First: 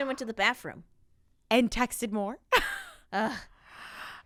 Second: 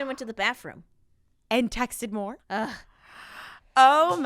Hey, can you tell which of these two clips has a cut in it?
second; 1 cut; at 2.4 s

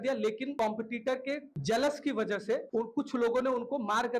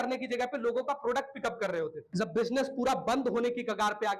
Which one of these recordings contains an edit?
second; 1 cut; at 2.0 s

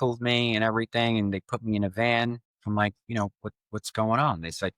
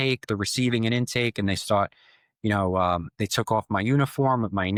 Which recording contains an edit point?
first; 1 cut; at 2.5 s

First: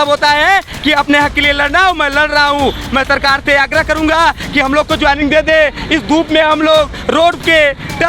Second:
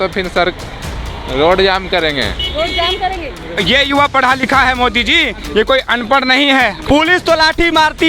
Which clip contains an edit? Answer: second; 2 cuts; at 3.3 s, 6.8 s

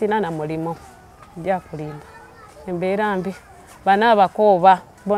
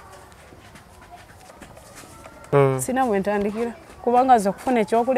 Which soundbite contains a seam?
second; 1 cut; at 2.5 s

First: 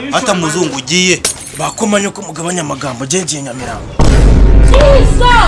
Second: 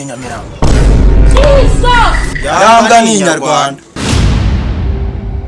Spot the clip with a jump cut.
second; 1 cut; at 3.9 s

